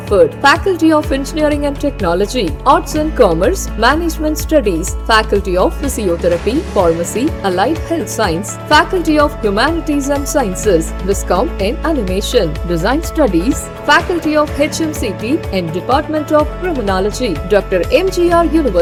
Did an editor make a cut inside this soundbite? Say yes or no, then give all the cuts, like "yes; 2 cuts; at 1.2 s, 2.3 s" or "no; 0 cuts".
no; 0 cuts